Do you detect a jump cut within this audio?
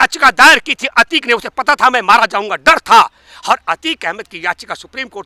no; 0 cuts

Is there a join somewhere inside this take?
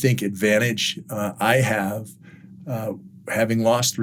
no; 0 cuts

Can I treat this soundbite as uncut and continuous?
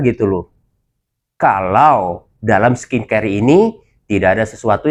yes; 0 cuts

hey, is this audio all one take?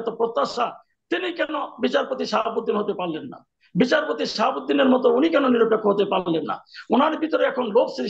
yes; 0 cuts

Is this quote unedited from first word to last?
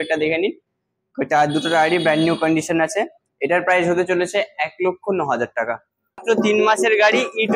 no; 1 cut; at 6.2 s

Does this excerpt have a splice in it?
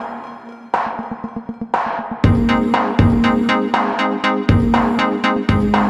no; 0 cuts

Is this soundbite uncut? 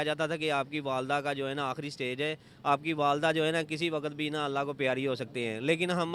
yes; 0 cuts

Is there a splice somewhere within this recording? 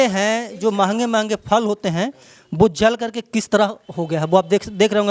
no; 0 cuts

